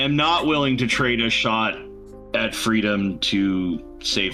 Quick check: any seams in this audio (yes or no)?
no